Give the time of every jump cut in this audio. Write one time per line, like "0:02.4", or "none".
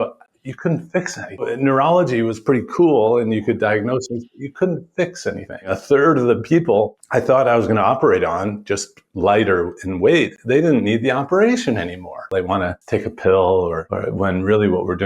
0:01.4
0:05.8
0:07.0
0:12.6
0:13.9

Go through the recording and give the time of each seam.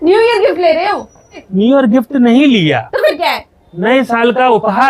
0:01.4

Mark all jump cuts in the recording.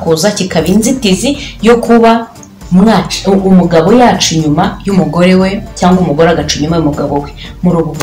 none

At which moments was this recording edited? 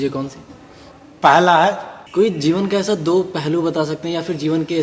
0:01.9

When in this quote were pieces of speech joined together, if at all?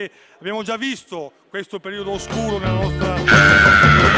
0:03.2

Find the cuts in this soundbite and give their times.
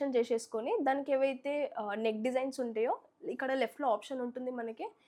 none

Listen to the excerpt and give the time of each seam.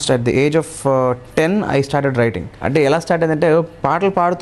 0:02.6

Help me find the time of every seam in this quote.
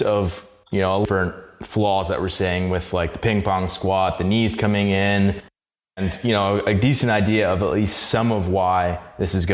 0:01.0
0:05.9

